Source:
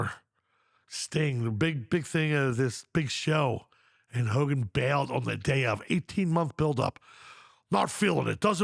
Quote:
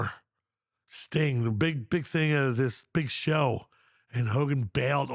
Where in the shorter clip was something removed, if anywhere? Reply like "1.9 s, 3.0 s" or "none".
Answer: none

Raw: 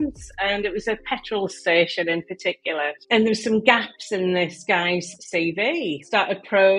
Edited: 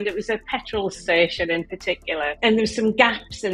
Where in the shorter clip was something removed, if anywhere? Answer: 2.3 s

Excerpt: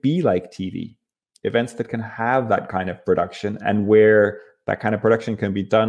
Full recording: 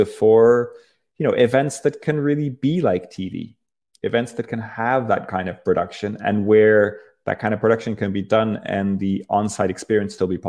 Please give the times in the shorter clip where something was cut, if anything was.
none

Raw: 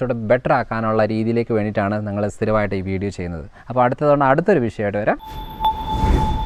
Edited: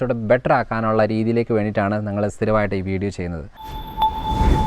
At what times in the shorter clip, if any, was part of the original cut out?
3.6 s

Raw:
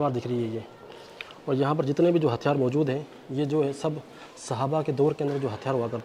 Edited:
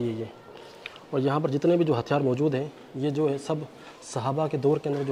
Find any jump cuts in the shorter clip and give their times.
none

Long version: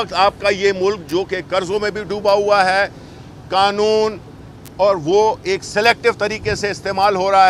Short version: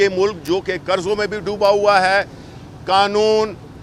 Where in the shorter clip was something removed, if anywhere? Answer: none

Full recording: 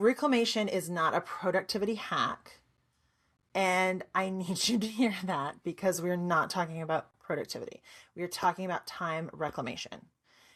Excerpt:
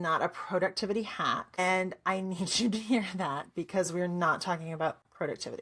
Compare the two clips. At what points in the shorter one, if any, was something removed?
1.6 s

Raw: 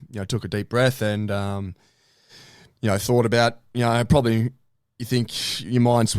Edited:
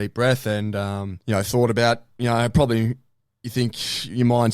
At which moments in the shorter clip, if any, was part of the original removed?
1.1 s

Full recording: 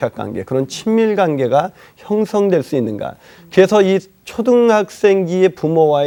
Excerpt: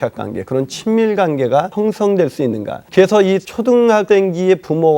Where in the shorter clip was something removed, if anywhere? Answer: 1.7 s, 2.7 s, 3.9 s

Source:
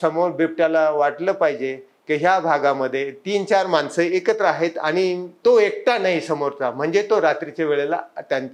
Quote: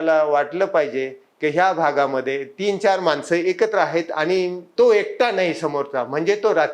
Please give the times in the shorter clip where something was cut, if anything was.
none

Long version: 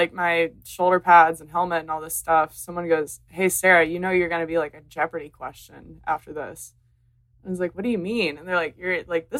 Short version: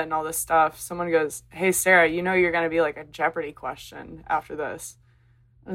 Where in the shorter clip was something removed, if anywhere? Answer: none

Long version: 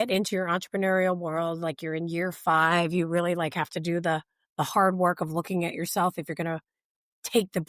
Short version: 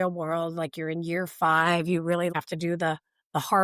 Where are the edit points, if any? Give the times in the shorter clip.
2.3 s

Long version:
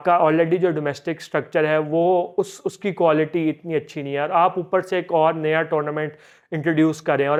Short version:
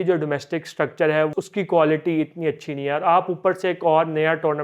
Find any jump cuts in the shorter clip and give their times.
1.3 s

